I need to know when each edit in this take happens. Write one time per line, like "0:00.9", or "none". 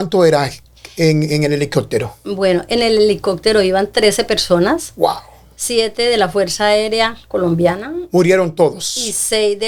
none